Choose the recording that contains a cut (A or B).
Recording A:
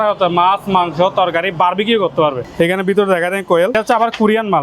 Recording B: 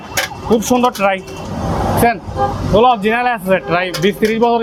A